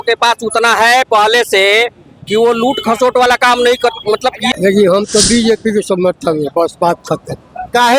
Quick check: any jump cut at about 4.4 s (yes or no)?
yes